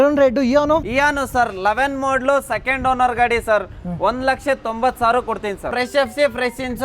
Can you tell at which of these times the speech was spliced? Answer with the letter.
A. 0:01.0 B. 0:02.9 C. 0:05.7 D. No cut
C